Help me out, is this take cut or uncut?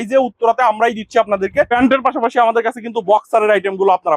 cut